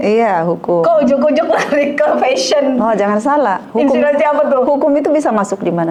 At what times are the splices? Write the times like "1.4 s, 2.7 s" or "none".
none